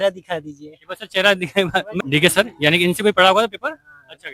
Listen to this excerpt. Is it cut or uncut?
cut